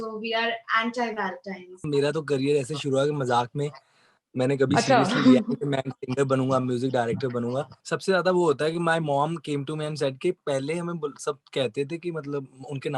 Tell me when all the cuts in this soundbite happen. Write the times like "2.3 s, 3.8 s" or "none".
1.8 s, 7.8 s